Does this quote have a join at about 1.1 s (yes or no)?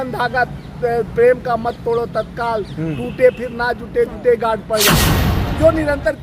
no